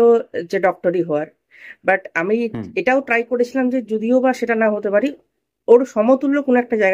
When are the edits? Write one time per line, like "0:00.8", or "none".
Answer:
none